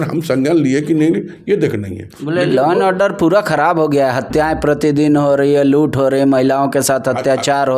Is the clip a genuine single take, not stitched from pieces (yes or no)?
yes